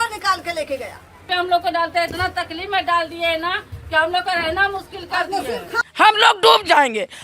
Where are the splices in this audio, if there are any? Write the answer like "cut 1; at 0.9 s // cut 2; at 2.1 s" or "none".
cut 1; at 1.3 s // cut 2; at 5.7 s

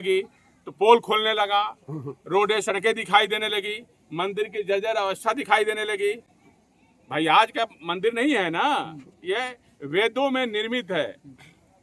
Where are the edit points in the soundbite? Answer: none

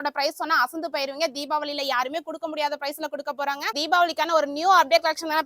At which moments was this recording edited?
cut 1; at 3.8 s

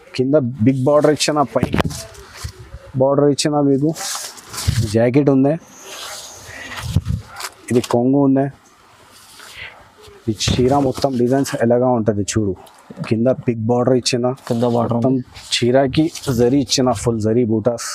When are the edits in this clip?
cut 1; at 4.9 s

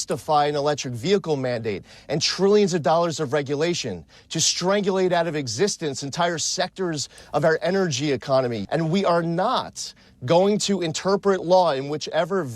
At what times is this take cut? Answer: cut 1; at 8.6 s

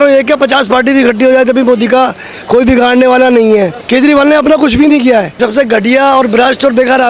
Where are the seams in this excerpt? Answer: cut 1; at 3.8 s // cut 2; at 5.4 s

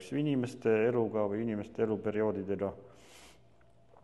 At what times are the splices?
none

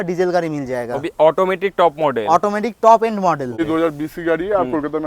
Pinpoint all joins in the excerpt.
cut 1; at 3.6 s

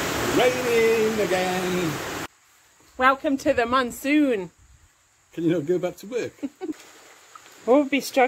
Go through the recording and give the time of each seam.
cut 1; at 2.3 s // cut 2; at 6.8 s

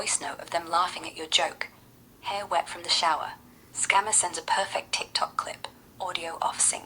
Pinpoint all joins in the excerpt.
none

